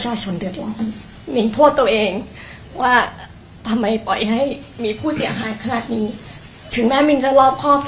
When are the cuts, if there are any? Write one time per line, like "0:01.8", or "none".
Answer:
0:01.1